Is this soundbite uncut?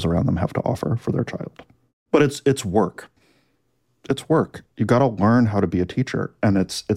no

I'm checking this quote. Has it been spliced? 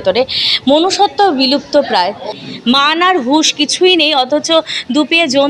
yes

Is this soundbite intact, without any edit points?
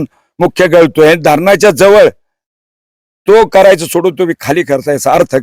yes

